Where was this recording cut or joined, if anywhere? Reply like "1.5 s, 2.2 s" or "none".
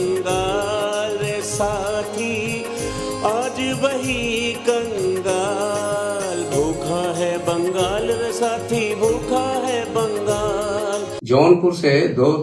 11.2 s